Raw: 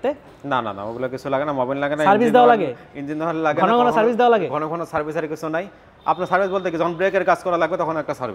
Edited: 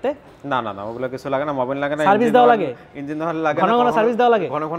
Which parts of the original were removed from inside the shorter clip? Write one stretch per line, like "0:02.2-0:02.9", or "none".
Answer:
none